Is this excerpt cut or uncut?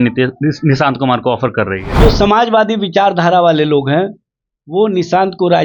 cut